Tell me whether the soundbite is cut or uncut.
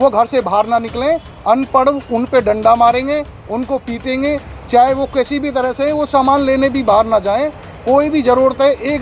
uncut